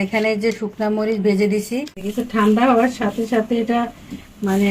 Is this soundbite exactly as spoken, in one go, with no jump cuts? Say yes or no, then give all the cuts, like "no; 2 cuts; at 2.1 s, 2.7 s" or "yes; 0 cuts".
no; 1 cut; at 2.0 s